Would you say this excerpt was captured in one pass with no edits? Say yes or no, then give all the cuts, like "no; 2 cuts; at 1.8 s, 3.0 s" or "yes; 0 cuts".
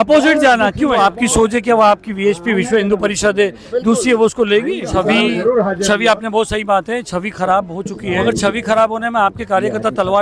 no; 3 cuts; at 1.0 s, 4.9 s, 8.2 s